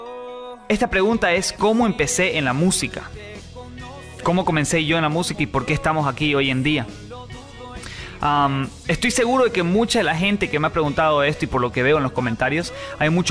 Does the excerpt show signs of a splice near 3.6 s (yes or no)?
no